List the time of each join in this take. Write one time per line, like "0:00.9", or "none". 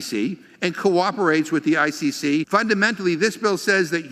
0:02.5